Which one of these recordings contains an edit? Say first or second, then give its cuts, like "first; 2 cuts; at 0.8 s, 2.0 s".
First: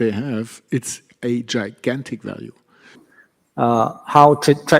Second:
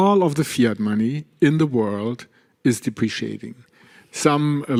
first; 1 cut; at 3.0 s